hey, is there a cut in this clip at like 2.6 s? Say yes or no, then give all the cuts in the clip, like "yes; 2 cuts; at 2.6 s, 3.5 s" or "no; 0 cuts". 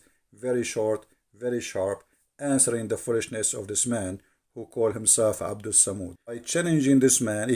no; 1 cut; at 6.5 s